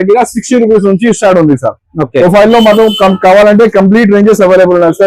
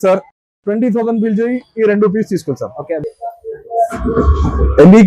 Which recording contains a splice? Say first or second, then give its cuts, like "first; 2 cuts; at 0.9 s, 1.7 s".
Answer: second; 1 cut; at 3.0 s